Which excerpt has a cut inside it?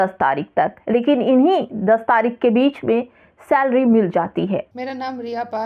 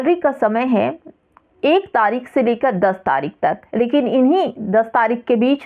first; 1 cut; at 4.7 s

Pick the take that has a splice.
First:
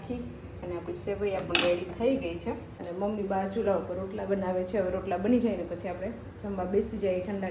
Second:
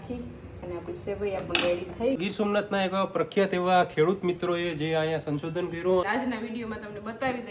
second; 2 cuts; at 2.2 s, 6.1 s

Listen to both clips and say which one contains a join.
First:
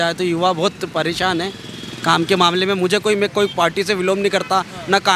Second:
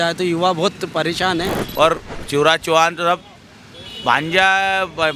second; 1 cut; at 1.6 s

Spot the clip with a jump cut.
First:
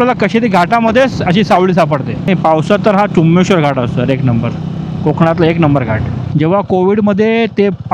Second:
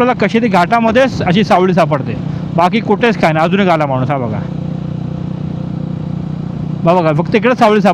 first; 2 cuts; at 2.3 s, 6.2 s

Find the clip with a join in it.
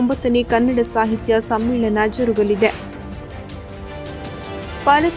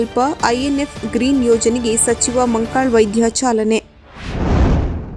second; 1 cut; at 4.2 s

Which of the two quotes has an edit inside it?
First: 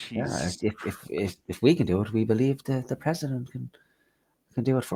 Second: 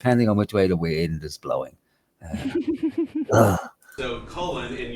second; 1 cut; at 3.9 s

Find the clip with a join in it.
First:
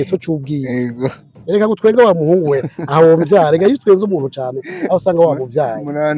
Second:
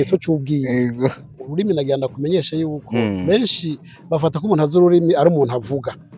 second; 1 cut; at 1.4 s

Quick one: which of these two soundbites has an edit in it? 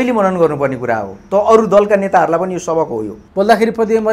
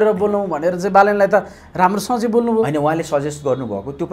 first; 1 cut; at 3.2 s

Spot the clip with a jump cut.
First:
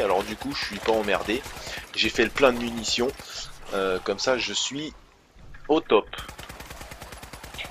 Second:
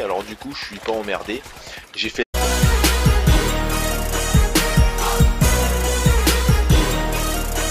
first; 1 cut; at 2.3 s

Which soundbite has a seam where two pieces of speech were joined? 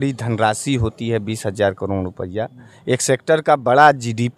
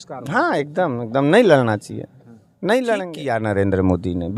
second; 1 cut; at 3.2 s

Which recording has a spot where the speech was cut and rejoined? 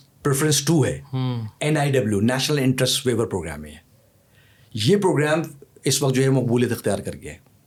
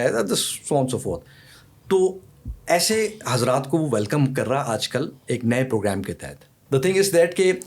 second; 1 cut; at 6.5 s

